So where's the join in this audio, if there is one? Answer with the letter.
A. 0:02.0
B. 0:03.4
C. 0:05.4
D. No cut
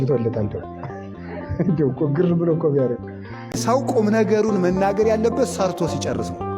B